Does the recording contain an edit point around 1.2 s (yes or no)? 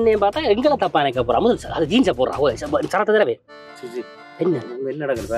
no